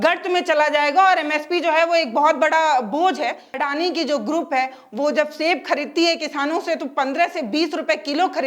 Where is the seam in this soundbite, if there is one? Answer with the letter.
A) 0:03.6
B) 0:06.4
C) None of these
A